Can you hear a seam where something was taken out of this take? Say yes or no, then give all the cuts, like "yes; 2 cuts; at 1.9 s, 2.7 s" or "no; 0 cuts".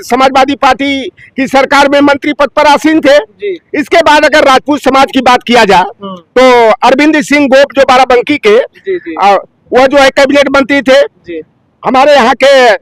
no; 0 cuts